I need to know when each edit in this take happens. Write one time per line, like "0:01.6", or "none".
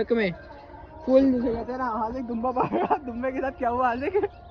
none